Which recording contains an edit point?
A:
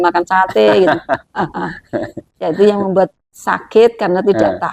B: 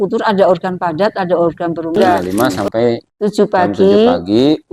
B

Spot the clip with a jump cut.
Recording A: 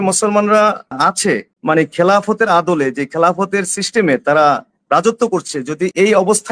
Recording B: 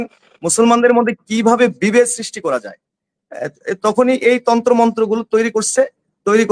A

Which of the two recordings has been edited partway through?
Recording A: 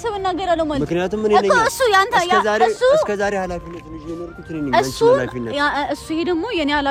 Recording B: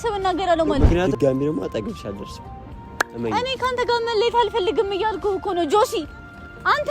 B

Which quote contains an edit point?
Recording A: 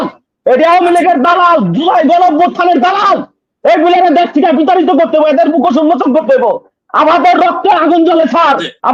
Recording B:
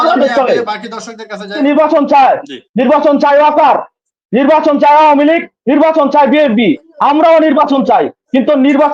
B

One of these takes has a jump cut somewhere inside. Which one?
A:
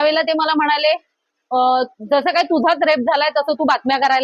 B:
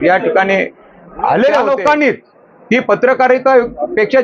B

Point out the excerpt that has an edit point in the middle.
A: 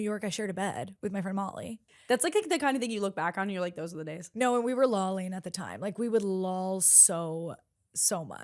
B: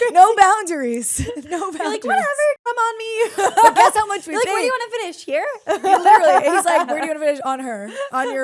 A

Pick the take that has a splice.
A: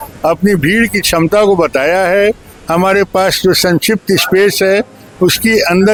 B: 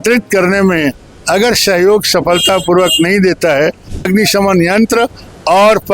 B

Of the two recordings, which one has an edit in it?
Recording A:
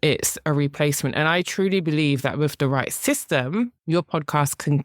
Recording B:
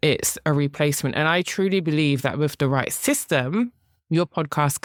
A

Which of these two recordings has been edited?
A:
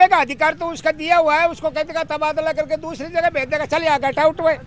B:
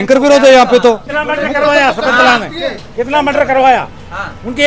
B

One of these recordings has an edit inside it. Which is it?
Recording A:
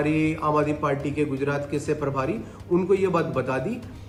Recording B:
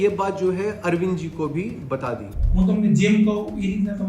B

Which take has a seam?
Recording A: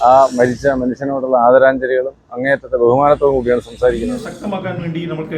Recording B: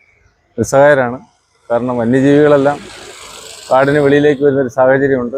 A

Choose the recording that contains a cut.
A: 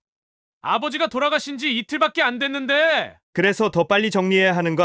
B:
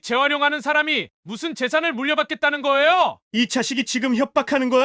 B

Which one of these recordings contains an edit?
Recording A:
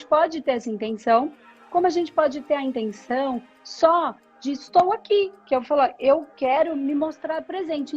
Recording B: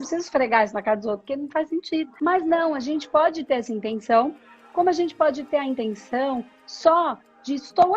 B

